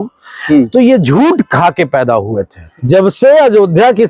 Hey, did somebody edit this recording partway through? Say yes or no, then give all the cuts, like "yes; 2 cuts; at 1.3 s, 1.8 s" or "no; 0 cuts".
yes; 1 cut; at 2.6 s